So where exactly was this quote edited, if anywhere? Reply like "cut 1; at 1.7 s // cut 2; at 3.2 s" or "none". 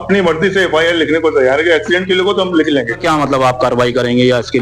cut 1; at 3.0 s